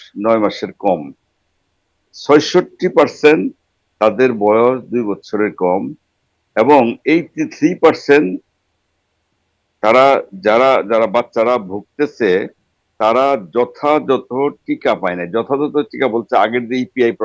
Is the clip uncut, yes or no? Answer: yes